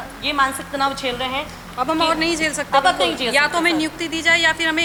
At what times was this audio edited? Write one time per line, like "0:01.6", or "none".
none